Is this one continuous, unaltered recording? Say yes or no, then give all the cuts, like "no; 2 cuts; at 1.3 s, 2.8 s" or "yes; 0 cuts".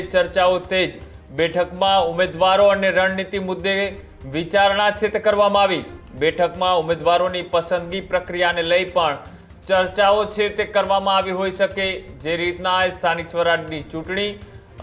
yes; 0 cuts